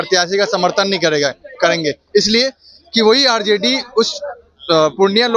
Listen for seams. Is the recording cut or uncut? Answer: uncut